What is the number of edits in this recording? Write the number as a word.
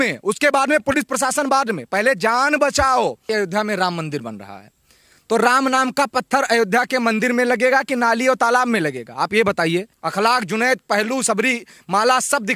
two